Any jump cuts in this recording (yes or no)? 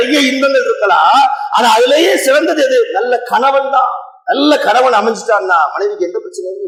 no